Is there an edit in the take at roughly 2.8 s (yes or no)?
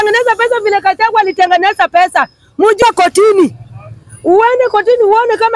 yes